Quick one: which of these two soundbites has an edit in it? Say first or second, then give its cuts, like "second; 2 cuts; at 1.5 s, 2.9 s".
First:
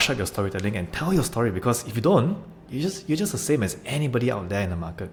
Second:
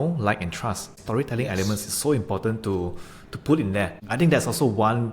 second; 2 cuts; at 1.0 s, 4.0 s